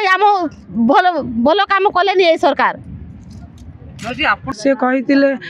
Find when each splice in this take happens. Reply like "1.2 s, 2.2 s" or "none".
4.5 s